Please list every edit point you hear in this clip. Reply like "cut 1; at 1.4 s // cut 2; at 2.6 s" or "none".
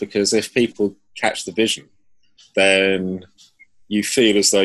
none